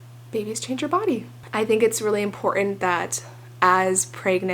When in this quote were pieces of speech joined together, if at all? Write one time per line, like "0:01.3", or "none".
0:01.4